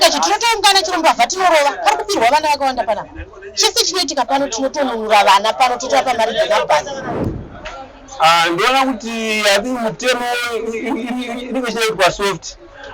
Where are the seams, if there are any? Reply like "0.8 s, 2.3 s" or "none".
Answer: 7.1 s